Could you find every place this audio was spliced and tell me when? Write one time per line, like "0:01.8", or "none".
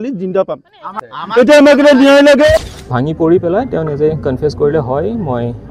0:02.7